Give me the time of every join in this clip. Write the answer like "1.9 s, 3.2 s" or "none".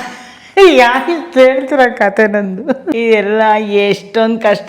2.8 s